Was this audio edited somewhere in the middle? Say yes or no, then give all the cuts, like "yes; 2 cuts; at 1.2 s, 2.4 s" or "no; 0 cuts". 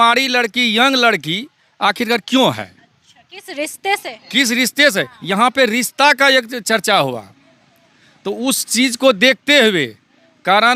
no; 0 cuts